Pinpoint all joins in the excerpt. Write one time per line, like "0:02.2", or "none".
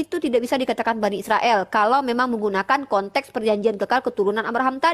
none